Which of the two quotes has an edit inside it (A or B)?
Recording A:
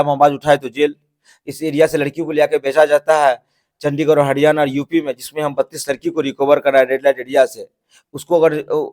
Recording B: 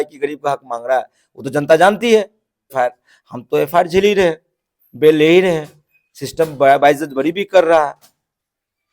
B